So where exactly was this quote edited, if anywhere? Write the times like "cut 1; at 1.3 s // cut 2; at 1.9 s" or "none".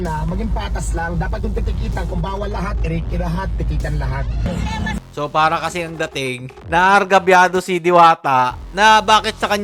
none